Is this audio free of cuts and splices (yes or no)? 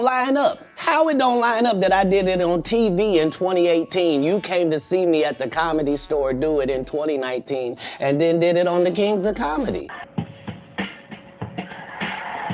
no